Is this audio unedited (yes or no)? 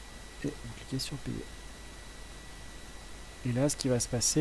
yes